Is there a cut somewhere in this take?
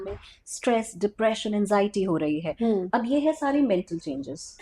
no; 0 cuts

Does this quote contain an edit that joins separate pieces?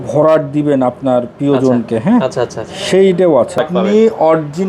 yes; 1 cut; at 3.6 s

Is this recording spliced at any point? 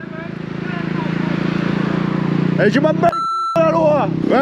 no; 0 cuts

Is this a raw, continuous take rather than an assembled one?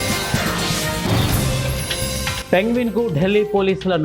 yes; 0 cuts

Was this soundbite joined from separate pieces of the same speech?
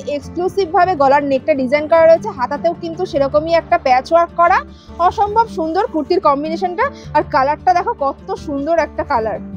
no; 0 cuts

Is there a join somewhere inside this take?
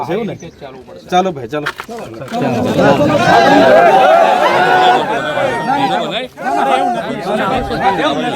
no; 0 cuts

